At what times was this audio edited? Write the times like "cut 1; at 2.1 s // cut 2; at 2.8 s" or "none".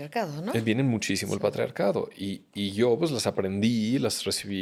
none